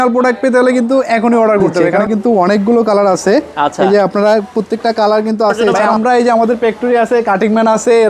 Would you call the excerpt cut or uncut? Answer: cut